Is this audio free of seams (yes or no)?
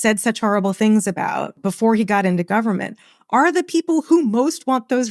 no